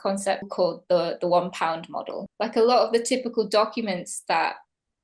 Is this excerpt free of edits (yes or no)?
no